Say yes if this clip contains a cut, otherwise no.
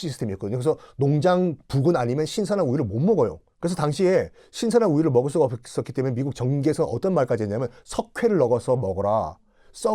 yes